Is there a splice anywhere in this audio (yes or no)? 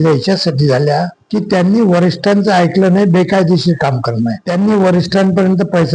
yes